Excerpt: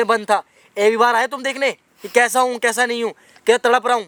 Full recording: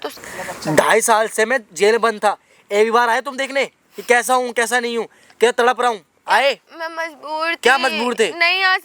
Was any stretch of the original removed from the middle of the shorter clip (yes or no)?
no